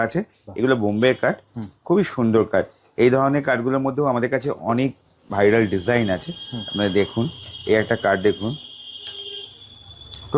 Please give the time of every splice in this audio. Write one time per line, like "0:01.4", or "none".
none